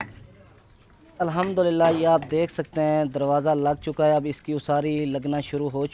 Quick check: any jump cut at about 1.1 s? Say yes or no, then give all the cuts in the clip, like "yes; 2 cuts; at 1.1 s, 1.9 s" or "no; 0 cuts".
yes; 1 cut; at 1.1 s